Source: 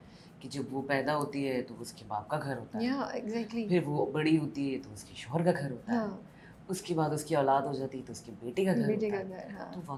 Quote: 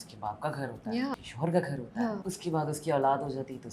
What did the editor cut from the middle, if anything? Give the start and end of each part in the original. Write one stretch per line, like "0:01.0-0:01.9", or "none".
0:03.1-0:05.1
0:06.2-0:06.7